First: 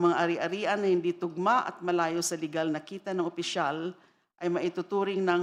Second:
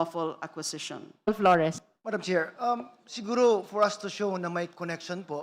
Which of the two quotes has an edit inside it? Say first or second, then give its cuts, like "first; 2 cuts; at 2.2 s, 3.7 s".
second; 1 cut; at 1.3 s